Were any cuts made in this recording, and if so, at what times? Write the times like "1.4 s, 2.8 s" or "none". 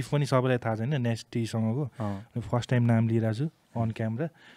none